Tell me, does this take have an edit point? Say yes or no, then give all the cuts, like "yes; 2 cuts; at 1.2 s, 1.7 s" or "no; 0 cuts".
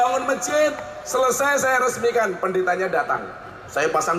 no; 0 cuts